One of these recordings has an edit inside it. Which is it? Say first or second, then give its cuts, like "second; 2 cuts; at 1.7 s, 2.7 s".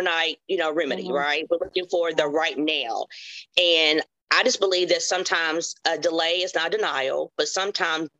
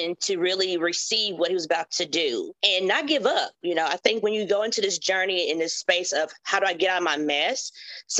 second; 2 cuts; at 2.6 s, 4.0 s